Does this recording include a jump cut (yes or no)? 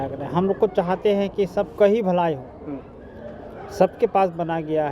no